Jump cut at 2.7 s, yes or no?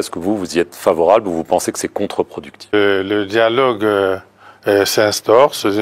yes